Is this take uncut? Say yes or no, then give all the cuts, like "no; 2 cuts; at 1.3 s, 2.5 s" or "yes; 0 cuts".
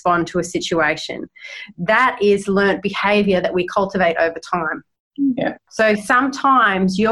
yes; 0 cuts